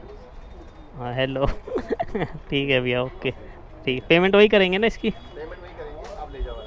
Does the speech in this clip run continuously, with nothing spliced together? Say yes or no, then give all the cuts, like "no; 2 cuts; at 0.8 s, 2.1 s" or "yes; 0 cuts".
yes; 0 cuts